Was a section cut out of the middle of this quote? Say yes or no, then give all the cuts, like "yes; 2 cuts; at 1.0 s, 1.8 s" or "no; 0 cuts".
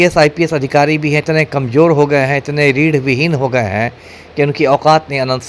no; 0 cuts